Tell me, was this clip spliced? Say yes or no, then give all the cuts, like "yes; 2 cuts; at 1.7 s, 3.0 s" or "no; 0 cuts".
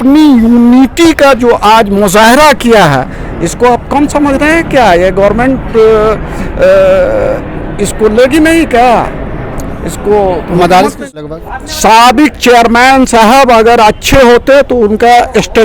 yes; 1 cut; at 11.2 s